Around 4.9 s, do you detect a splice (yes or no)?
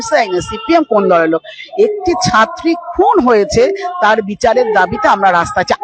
no